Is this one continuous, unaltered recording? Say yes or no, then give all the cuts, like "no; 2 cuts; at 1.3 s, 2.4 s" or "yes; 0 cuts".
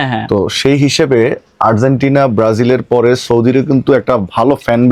yes; 0 cuts